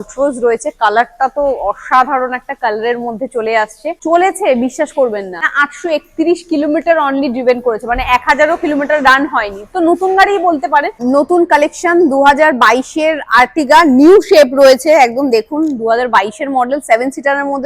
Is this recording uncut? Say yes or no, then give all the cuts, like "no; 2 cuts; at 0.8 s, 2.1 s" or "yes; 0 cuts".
no; 2 cuts; at 3.9 s, 10.9 s